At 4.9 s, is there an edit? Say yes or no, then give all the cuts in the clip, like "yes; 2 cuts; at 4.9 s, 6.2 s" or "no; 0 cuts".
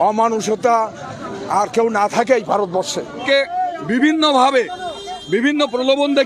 no; 1 cut; at 3.2 s